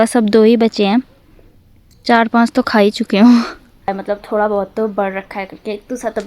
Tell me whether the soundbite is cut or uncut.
cut